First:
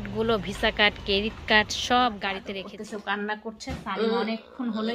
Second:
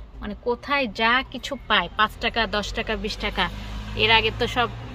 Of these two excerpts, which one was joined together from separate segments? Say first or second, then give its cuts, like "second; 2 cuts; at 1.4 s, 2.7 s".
first; 1 cut; at 2.4 s